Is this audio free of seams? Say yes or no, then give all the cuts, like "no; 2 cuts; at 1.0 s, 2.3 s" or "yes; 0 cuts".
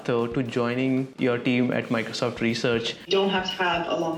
no; 2 cuts; at 1.1 s, 3.1 s